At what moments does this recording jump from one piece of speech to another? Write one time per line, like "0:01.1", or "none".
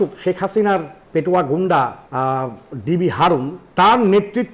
0:01.0
0:02.0
0:03.6